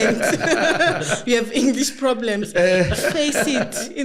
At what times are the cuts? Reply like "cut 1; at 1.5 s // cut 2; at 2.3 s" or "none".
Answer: none